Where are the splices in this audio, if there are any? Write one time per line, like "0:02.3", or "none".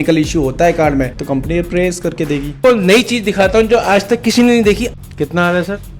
0:01.2
0:02.6
0:04.9